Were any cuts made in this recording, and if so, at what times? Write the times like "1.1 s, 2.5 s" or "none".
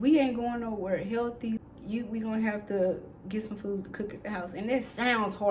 1.6 s